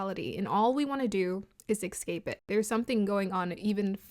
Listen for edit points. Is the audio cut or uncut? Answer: cut